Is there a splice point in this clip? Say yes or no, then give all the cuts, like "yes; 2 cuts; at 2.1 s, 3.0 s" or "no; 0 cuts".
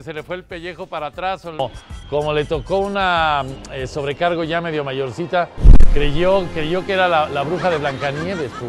yes; 1 cut; at 1.6 s